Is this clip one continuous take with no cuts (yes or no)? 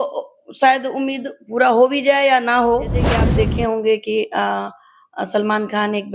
no